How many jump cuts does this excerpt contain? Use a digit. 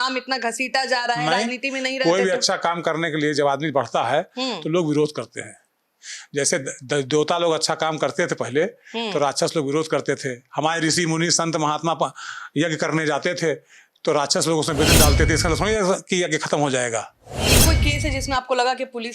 1